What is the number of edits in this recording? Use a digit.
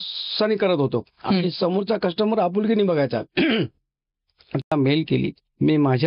1